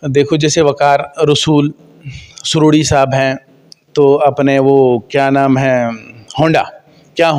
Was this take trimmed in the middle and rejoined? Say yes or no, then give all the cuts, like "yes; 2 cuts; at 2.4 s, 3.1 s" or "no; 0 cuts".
no; 0 cuts